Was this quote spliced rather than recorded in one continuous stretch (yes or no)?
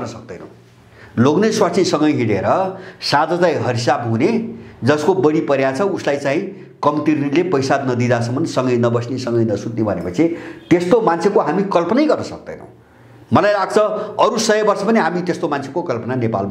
no